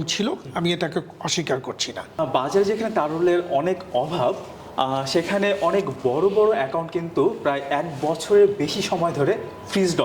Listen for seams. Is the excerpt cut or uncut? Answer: cut